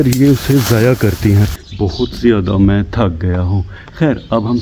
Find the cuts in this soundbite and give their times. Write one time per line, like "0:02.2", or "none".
0:01.5

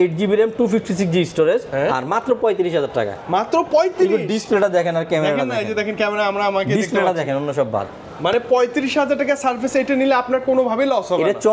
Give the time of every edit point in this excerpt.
none

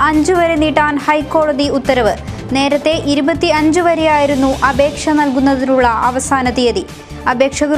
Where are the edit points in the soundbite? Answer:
none

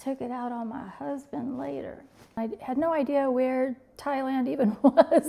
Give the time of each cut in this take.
0:02.4

